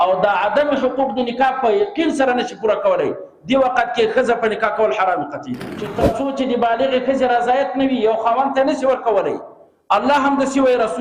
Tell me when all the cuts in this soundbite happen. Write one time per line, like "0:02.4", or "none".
0:06.0